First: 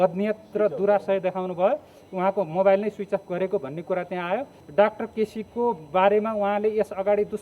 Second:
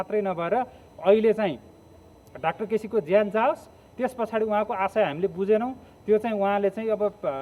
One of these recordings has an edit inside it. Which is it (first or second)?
first